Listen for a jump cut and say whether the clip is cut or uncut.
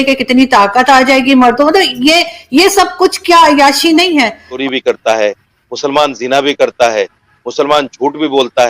cut